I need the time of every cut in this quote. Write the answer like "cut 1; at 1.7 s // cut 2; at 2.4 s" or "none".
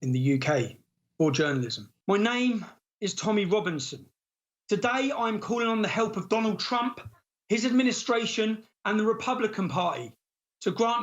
cut 1; at 1.8 s